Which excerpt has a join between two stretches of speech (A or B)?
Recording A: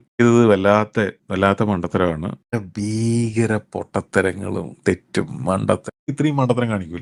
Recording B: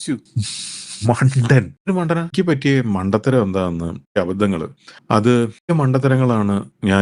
B